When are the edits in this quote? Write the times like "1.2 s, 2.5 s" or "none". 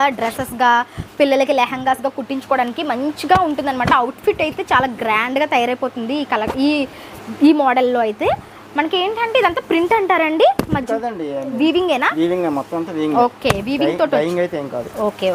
none